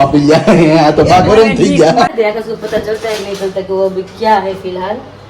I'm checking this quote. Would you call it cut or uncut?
cut